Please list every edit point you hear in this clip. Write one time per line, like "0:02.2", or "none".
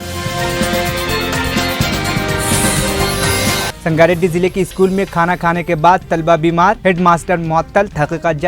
0:03.8